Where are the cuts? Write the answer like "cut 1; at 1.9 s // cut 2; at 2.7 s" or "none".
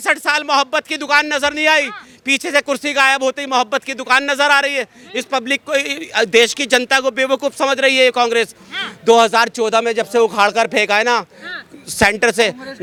none